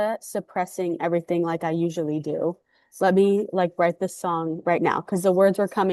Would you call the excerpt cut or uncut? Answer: uncut